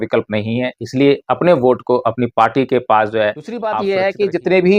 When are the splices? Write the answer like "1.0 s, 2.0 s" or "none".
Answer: 3.8 s